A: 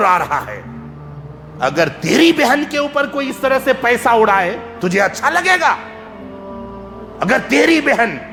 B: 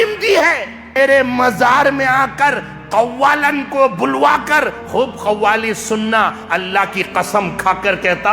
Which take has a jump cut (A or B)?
B